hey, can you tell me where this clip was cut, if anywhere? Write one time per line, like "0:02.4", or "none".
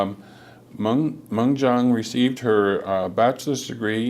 0:01.1